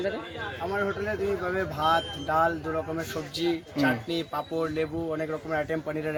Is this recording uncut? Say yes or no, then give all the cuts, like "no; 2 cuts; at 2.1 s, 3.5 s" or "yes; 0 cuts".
yes; 0 cuts